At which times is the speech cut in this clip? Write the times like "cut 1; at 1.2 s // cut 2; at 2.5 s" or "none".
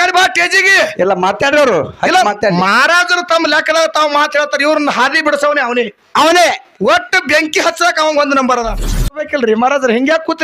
cut 1; at 9.0 s